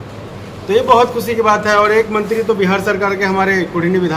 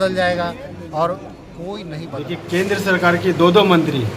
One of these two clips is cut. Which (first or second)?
second